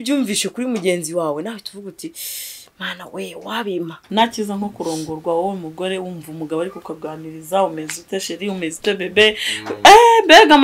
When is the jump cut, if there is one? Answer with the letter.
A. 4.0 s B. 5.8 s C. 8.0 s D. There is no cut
A